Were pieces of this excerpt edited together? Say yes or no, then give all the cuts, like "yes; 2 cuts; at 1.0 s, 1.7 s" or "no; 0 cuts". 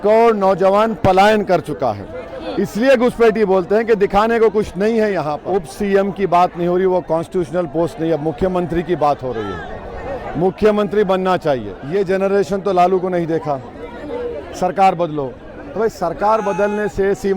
yes; 2 cuts; at 5.4 s, 11.8 s